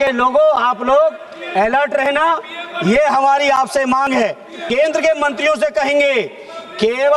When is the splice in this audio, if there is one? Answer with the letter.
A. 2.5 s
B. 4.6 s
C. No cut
B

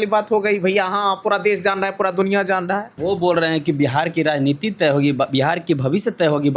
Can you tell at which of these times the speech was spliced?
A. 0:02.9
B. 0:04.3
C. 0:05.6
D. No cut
A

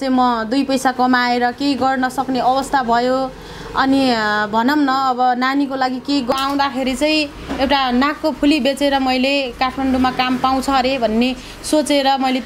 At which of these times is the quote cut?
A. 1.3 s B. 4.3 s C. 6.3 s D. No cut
C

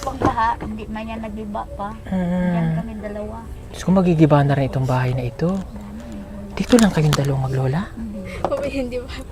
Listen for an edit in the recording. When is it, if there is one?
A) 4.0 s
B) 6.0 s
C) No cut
C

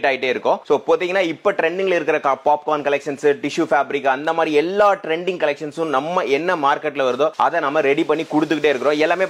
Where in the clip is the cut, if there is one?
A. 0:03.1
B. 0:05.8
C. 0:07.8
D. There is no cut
D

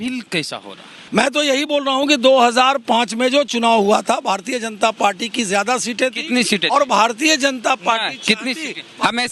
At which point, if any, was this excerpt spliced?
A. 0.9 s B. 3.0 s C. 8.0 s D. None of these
A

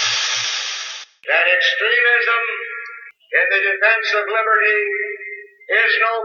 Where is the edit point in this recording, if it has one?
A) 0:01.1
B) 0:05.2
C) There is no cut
C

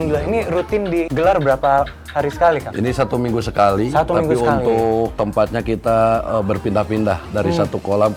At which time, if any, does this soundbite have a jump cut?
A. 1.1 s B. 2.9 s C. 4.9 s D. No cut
A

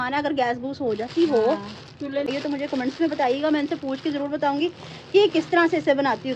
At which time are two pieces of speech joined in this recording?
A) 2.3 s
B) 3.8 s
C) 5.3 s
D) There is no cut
A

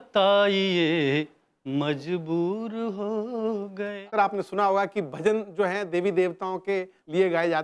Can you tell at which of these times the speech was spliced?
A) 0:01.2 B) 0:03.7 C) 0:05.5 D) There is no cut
B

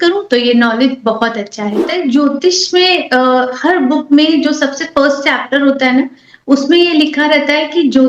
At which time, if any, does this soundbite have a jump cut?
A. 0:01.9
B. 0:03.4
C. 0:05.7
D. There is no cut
A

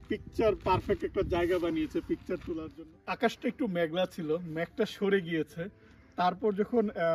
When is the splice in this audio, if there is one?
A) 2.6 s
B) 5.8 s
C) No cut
A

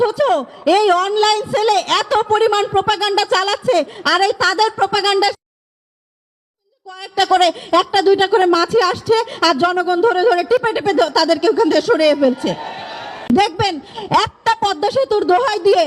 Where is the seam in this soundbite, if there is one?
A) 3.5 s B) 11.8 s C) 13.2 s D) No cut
C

